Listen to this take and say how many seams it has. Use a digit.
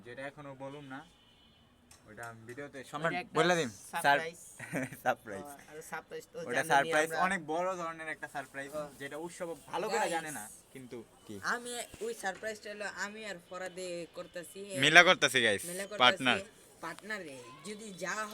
0